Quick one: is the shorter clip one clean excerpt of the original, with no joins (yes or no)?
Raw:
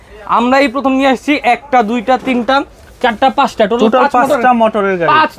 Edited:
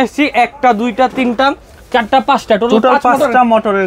yes